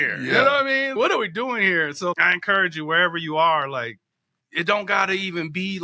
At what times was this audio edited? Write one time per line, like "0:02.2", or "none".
0:00.9
0:02.2

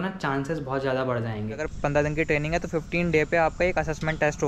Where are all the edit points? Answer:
0:01.7

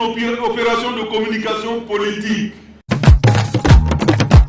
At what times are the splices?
none

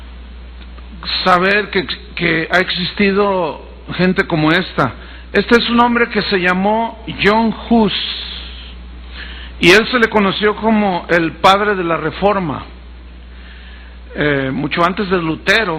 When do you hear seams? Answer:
none

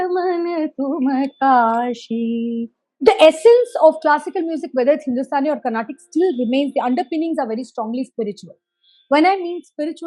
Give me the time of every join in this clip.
0:02.8

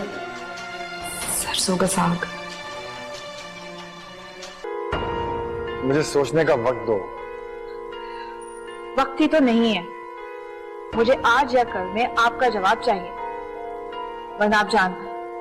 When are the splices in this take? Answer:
0:04.6

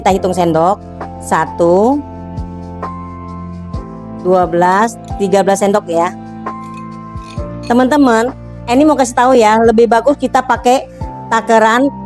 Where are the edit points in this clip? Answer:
0:06.1
0:07.7

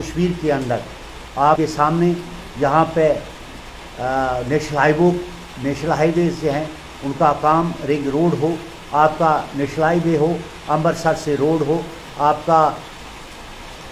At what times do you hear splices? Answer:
0:01.6

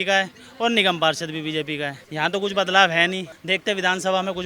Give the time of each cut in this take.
0:02.0
0:03.3

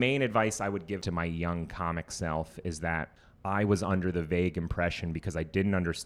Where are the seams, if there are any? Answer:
0:01.0
0:03.2

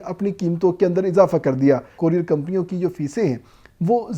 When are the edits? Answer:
0:01.9

